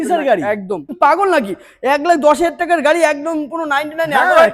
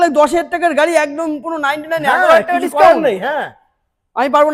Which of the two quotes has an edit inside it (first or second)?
first